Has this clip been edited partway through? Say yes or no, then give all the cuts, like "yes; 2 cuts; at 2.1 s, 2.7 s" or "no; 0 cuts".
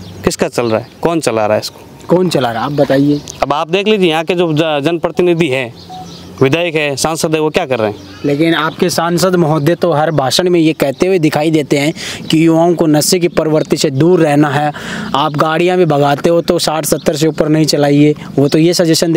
yes; 1 cut; at 8.1 s